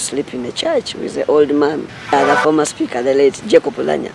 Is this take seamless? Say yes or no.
no